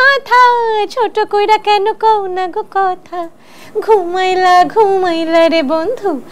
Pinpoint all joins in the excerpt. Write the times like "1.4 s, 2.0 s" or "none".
none